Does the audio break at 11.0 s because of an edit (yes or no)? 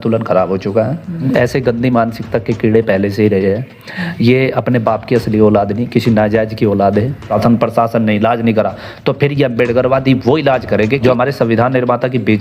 yes